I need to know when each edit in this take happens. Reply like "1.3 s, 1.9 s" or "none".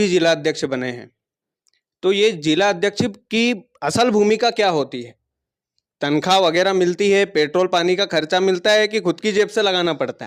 none